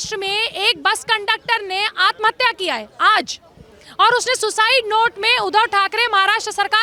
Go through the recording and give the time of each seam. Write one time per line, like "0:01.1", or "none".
none